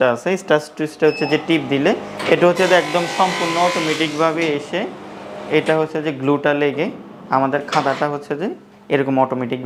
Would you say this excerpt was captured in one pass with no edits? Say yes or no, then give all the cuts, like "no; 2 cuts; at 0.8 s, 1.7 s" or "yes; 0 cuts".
yes; 0 cuts